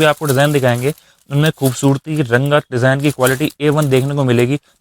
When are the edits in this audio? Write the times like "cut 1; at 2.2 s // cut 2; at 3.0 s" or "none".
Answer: none